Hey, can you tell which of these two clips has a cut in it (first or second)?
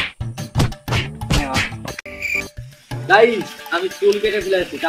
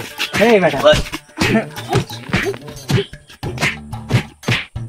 first